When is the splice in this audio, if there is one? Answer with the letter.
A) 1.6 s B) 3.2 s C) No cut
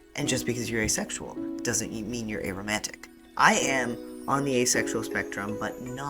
B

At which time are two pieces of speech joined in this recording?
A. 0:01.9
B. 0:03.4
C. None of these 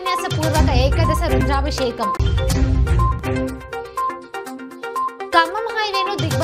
C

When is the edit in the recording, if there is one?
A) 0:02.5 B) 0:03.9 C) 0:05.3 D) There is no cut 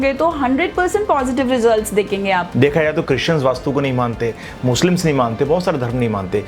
A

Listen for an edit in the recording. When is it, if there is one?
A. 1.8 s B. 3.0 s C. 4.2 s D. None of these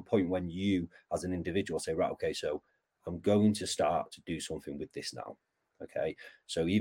D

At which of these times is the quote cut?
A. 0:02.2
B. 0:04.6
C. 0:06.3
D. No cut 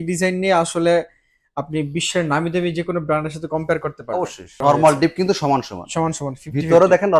B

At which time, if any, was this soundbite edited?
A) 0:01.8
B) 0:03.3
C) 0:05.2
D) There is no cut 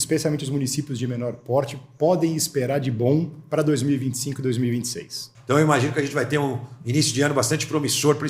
C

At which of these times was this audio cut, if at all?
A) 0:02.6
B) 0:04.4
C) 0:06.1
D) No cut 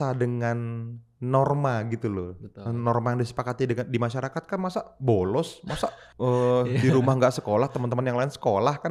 C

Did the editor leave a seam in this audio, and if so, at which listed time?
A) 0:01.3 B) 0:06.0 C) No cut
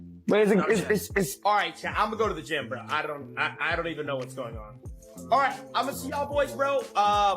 A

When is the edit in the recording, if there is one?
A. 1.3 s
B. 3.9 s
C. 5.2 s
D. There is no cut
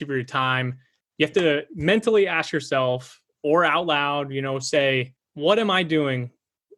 C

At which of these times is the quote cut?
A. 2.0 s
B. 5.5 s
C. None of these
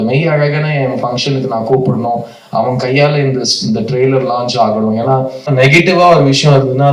B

